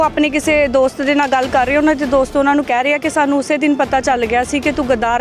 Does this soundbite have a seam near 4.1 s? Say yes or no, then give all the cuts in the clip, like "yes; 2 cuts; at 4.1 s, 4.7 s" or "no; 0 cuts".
no; 0 cuts